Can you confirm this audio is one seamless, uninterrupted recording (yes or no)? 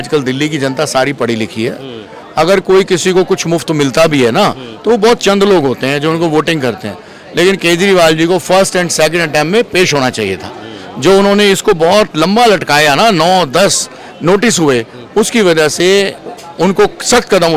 yes